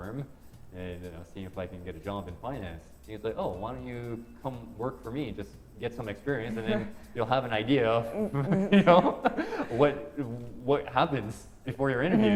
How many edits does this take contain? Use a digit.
0